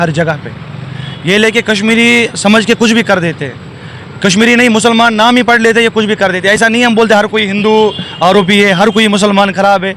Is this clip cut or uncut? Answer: uncut